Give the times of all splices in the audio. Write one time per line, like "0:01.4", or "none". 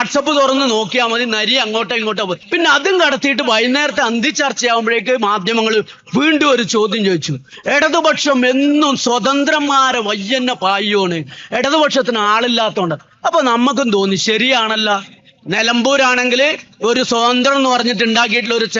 0:02.4